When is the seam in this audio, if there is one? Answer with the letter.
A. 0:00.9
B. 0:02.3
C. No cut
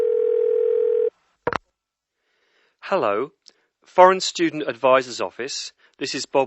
A